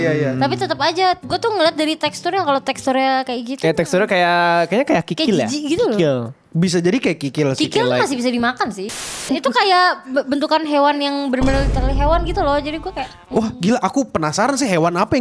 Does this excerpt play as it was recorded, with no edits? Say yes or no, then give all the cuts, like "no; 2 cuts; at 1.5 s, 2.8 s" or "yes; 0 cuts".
no; 1 cut; at 9.1 s